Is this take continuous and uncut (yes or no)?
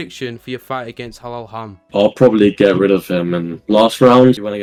yes